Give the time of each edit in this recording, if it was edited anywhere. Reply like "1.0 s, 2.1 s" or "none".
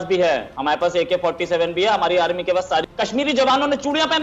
2.8 s